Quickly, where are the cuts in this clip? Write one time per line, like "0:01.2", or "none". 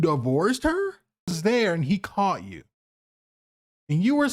0:01.4